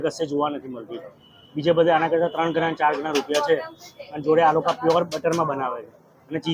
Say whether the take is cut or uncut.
uncut